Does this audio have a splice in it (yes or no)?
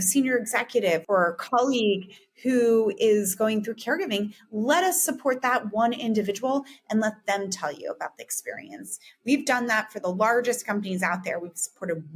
yes